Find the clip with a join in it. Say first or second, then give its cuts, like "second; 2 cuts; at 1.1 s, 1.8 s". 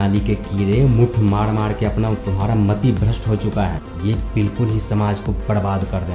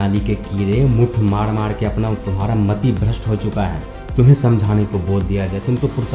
first; 1 cut; at 3.9 s